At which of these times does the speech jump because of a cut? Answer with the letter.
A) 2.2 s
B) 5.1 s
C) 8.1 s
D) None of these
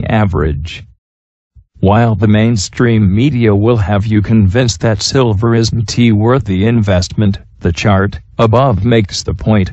D